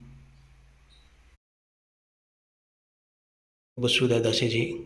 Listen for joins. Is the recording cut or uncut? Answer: uncut